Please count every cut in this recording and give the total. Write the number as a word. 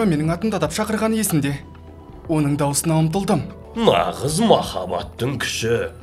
one